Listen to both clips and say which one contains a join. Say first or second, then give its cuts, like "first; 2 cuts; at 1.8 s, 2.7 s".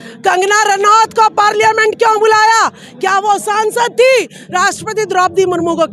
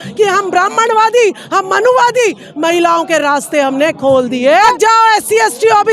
second; 1 cut; at 4.8 s